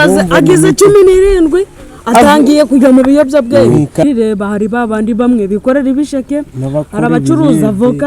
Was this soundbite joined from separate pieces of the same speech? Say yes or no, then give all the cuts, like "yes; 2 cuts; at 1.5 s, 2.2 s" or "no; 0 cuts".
yes; 1 cut; at 4.0 s